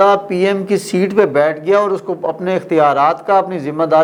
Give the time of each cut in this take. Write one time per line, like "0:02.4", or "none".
none